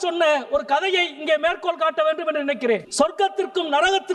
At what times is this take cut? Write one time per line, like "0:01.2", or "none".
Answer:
0:02.9